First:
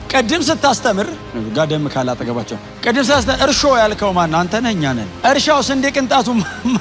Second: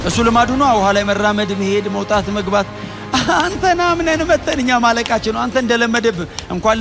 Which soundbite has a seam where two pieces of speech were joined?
first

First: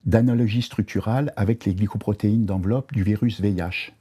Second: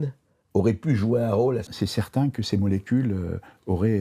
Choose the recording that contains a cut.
second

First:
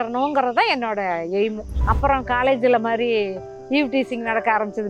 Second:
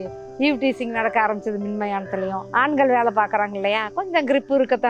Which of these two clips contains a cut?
first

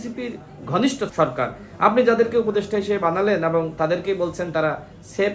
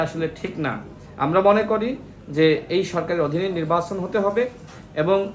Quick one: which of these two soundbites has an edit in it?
first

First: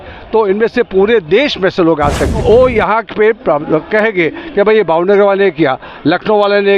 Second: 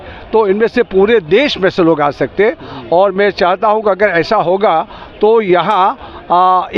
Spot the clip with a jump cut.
first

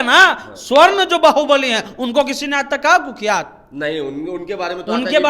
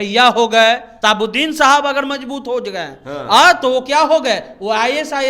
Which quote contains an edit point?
second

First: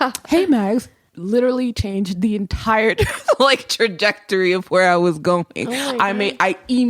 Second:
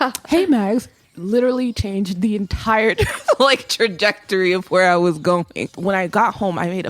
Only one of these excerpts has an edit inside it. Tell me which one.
second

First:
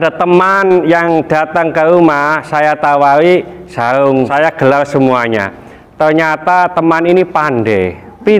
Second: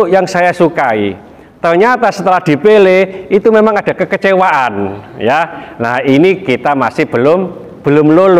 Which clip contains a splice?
first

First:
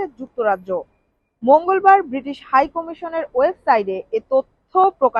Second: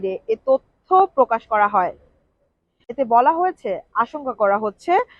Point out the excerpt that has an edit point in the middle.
second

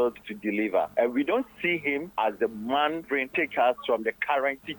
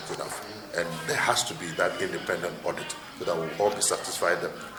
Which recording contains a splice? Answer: first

